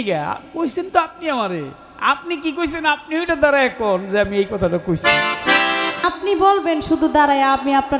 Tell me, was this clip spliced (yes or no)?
yes